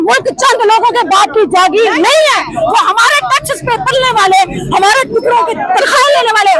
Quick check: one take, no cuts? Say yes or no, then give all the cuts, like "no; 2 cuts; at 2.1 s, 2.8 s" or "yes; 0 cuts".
yes; 0 cuts